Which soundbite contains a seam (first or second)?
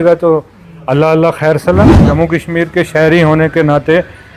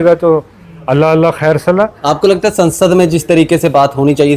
first